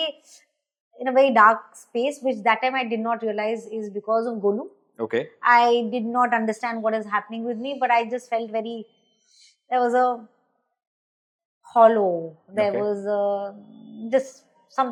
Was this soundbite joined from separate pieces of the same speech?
no; 0 cuts

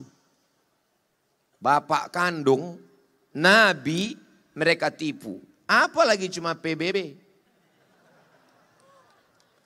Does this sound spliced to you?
no; 0 cuts

